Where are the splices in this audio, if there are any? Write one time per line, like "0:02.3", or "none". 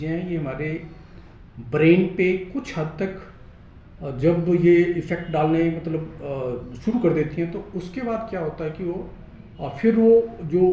none